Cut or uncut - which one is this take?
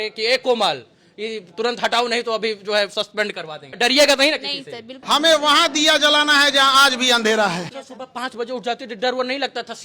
cut